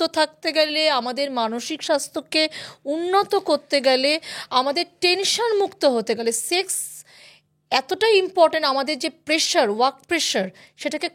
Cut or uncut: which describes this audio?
uncut